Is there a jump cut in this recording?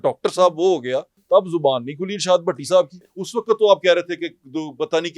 yes; 2 cuts; at 1.1 s, 3.2 s

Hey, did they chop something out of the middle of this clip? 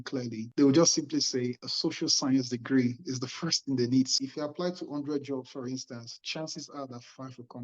yes; 1 cut; at 4.1 s

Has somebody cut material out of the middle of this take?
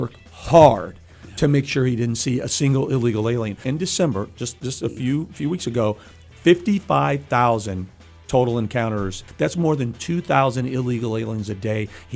yes; 2 cuts; at 3.6 s, 9.2 s

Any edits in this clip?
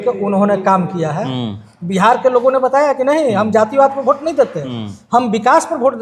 yes; 1 cut; at 1.6 s

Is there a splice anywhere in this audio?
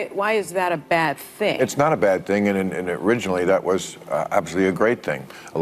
yes; 1 cut; at 1.7 s

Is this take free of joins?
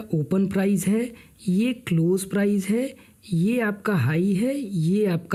yes; 0 cuts

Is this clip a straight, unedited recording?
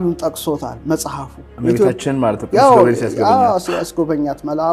yes; 0 cuts

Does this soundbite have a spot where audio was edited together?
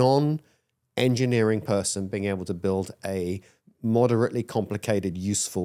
no; 0 cuts

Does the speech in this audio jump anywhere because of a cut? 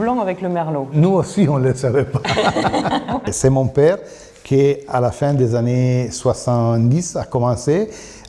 no; 0 cuts

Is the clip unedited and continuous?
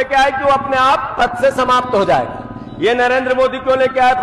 yes; 0 cuts

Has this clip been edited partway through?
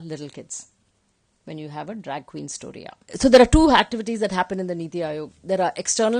yes; 1 cut; at 3.0 s

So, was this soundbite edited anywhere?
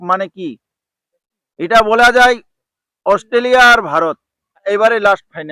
yes; 1 cut; at 4.6 s

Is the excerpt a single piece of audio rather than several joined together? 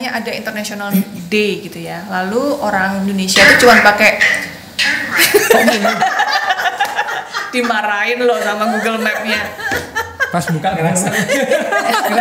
yes; 0 cuts

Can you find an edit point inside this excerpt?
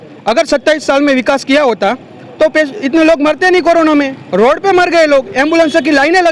no; 0 cuts

